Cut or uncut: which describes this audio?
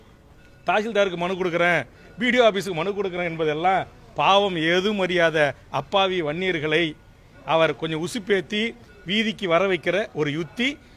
uncut